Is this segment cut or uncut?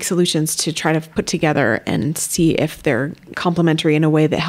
cut